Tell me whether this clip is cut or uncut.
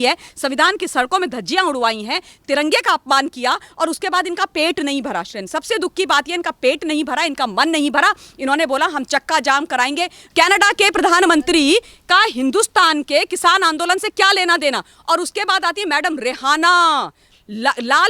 cut